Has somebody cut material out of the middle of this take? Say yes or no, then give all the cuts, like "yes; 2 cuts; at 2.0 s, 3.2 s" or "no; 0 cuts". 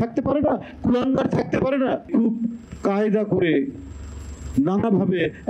yes; 1 cut; at 2.0 s